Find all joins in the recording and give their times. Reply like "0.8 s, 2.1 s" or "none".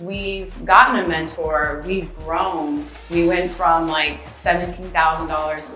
3.0 s